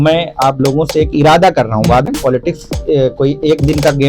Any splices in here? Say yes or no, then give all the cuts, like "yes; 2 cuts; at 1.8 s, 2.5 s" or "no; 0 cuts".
yes; 1 cut; at 2.0 s